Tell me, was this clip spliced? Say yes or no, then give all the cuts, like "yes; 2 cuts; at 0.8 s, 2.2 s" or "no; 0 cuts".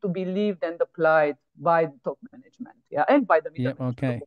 no; 0 cuts